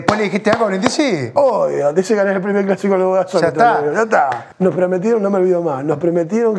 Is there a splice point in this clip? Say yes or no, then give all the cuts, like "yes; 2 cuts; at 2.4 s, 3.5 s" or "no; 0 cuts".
yes; 2 cuts; at 1.3 s, 4.4 s